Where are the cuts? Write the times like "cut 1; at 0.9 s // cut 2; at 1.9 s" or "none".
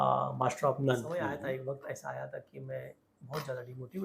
cut 1; at 1.3 s